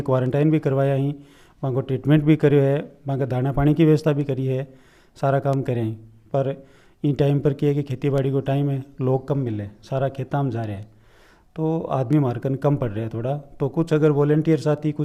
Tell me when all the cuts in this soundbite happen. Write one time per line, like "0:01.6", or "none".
none